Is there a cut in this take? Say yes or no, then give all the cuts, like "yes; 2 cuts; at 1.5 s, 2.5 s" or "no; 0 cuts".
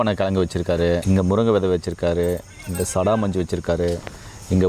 yes; 1 cut; at 1.0 s